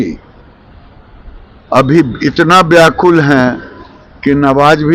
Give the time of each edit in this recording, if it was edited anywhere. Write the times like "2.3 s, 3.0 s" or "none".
none

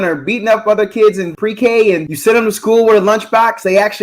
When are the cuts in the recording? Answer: 1.3 s, 2.1 s

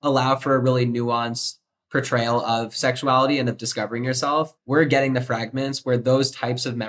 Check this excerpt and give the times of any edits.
4.5 s

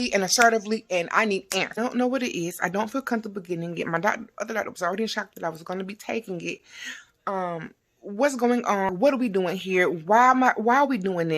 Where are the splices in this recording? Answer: 1.8 s, 8.9 s

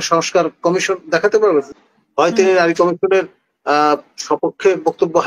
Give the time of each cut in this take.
1.7 s

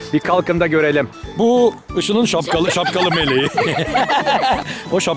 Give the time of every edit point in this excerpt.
1.2 s

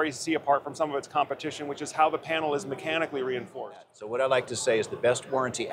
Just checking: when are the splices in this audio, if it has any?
4.0 s

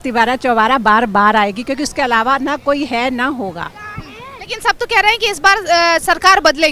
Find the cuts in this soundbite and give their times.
none

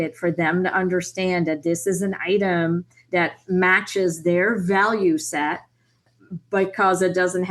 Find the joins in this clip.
none

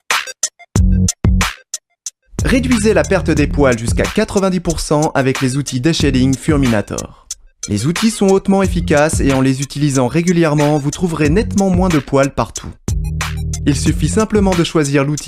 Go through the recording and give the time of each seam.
2.4 s

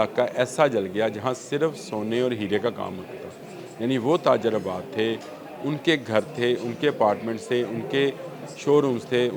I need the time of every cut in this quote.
none

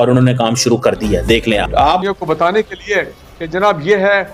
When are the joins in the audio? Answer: none

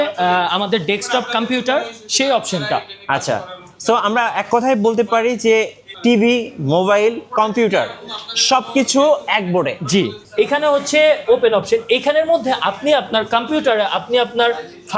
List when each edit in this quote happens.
10.2 s

